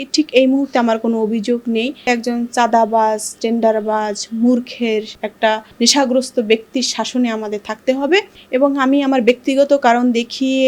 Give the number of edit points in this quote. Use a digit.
3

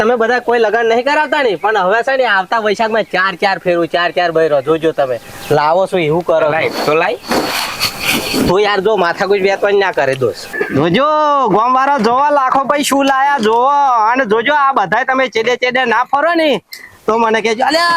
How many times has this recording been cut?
1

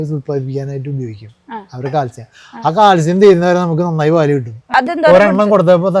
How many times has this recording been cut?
1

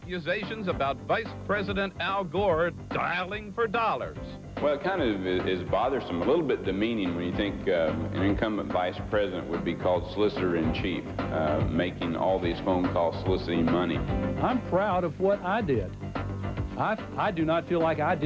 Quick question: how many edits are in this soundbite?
0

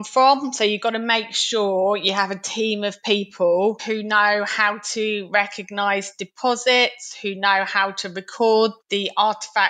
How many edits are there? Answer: 2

